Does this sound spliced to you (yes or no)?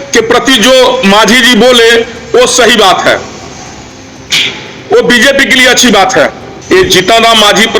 yes